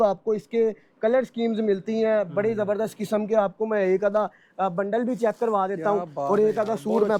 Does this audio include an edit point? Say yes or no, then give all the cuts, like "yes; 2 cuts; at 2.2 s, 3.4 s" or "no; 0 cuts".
no; 0 cuts